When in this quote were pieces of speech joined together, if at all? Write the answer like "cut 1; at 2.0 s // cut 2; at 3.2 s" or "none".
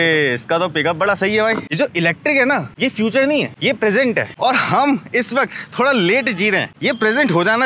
cut 1; at 1.7 s // cut 2; at 2.7 s // cut 3; at 3.5 s // cut 4; at 4.3 s // cut 5; at 6.7 s